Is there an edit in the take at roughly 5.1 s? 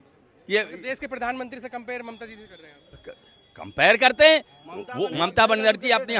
yes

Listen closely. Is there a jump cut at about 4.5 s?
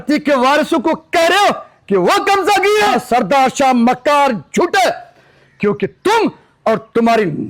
no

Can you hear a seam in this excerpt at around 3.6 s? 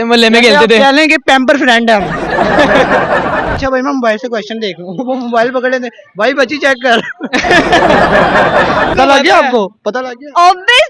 yes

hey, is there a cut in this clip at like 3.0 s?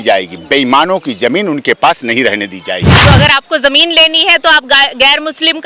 yes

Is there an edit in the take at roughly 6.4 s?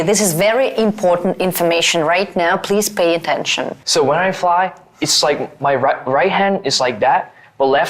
no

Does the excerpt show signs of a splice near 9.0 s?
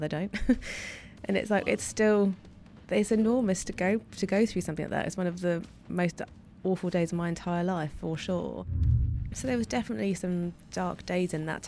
yes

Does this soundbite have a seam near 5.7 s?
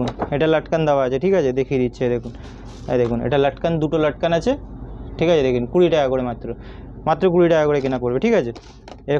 no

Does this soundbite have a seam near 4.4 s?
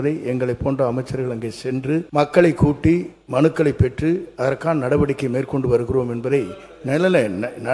no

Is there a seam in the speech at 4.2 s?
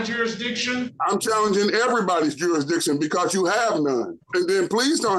yes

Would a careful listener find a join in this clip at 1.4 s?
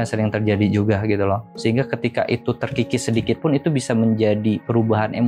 yes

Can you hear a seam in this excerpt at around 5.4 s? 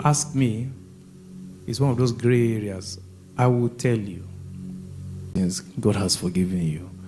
yes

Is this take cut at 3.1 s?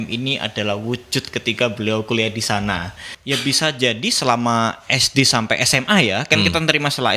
yes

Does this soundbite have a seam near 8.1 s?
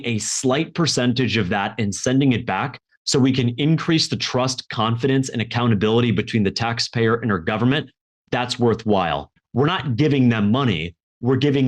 no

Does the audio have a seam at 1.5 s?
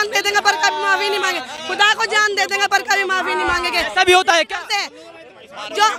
no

